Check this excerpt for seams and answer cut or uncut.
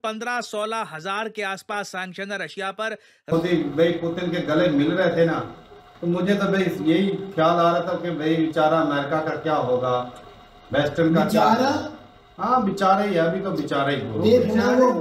cut